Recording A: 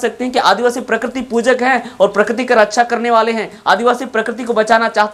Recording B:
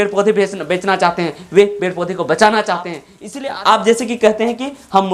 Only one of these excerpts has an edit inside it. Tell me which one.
B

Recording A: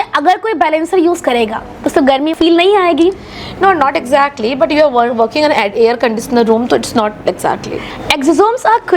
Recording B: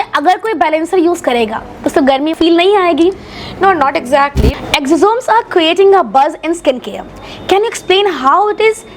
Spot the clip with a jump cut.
B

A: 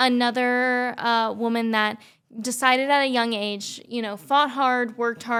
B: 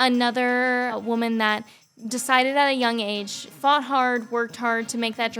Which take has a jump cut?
B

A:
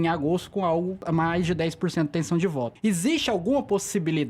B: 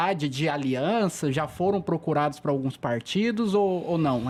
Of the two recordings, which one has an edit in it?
A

